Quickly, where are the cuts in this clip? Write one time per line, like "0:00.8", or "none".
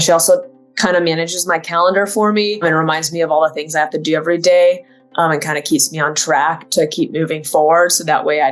0:02.6